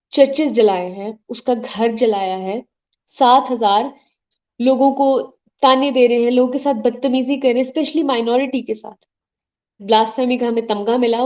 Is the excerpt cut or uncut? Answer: cut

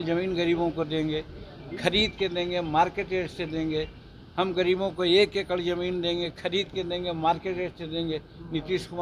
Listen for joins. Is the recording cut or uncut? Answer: uncut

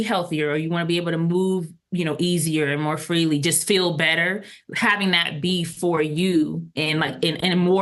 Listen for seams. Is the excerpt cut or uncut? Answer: uncut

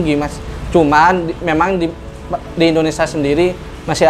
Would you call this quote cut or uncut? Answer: uncut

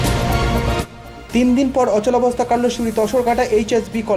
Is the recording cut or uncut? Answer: cut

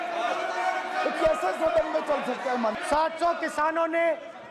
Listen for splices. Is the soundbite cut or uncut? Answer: cut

